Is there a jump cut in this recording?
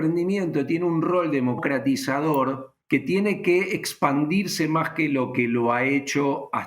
yes; 2 cuts; at 1.6 s, 2.7 s

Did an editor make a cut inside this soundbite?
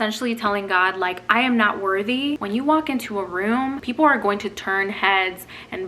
yes; 2 cuts; at 2.4 s, 3.8 s

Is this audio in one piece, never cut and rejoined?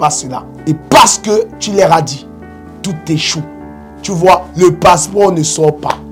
yes; 0 cuts

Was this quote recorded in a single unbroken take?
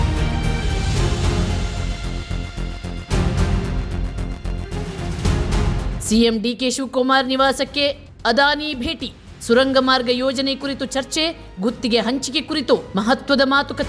no; 1 cut; at 2.8 s

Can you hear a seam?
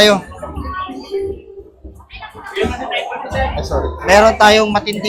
no; 0 cuts

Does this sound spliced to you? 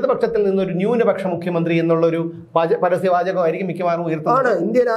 no; 0 cuts

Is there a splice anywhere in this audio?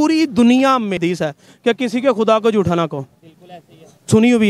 yes; 1 cut; at 1.0 s

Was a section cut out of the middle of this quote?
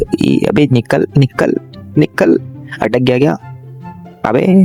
no; 0 cuts

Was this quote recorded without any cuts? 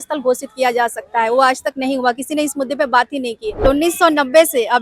no; 1 cut; at 3.6 s

